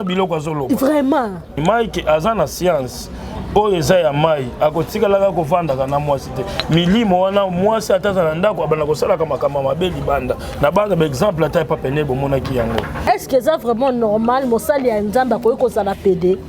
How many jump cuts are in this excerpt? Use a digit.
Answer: 2